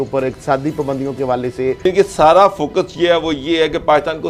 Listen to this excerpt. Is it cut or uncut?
cut